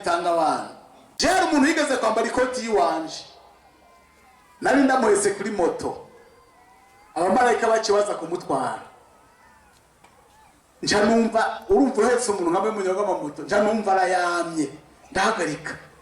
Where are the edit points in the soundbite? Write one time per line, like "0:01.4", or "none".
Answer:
0:01.0

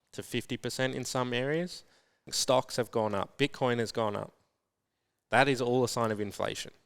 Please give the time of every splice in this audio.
0:02.3

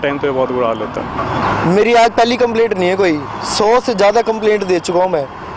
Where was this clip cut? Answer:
0:01.4

